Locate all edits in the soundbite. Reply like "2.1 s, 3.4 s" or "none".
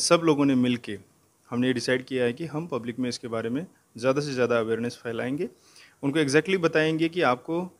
none